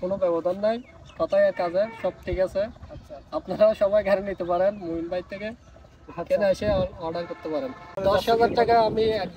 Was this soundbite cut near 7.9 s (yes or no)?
yes